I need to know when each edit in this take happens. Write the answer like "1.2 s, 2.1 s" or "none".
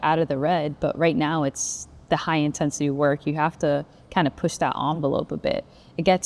none

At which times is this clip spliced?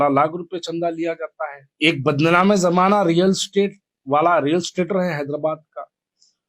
1.6 s

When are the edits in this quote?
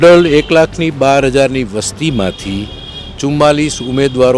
none

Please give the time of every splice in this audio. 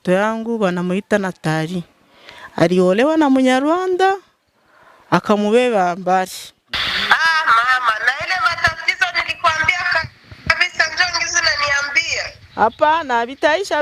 6.7 s

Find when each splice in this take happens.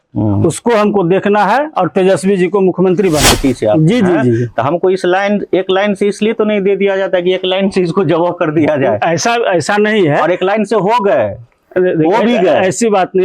3.4 s

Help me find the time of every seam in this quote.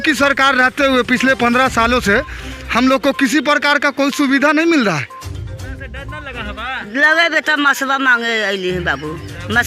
5.8 s

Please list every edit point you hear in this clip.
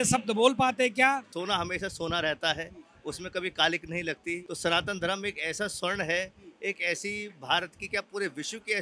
1.3 s, 4.5 s

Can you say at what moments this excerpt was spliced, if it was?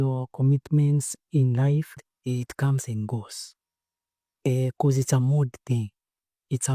2.1 s

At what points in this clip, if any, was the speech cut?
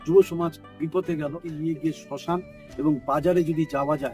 1.5 s

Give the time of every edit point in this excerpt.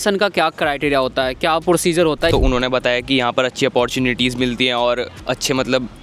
2.3 s, 5.1 s

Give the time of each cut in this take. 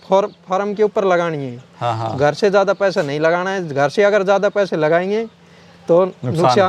none

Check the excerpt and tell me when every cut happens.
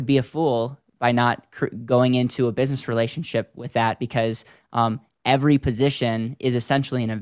none

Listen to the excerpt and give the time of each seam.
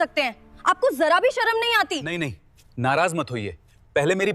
2.1 s

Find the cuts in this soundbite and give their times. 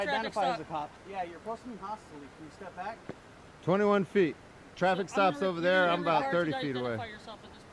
1.0 s

